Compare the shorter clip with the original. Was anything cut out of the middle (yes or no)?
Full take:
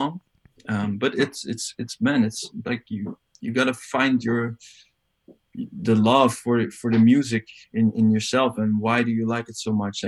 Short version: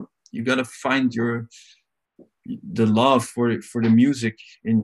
no